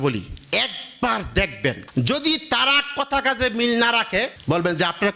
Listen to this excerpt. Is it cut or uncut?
cut